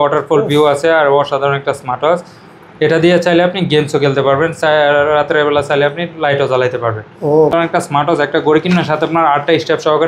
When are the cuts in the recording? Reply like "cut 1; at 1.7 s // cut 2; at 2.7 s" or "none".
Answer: cut 1; at 7.5 s